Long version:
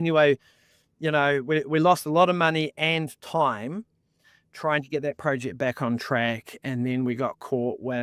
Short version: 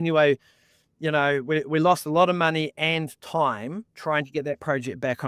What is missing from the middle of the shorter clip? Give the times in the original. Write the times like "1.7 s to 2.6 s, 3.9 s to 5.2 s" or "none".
3.9 s to 4.4 s